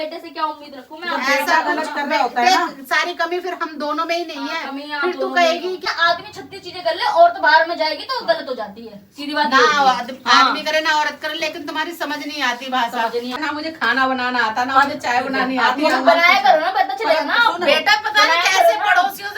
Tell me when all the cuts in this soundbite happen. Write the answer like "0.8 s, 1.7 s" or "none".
5.9 s, 13.4 s